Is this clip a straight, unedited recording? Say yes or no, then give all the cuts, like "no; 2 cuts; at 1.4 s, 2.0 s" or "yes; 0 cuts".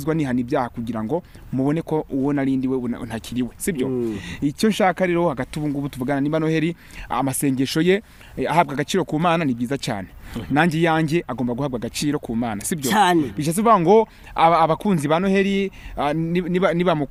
yes; 0 cuts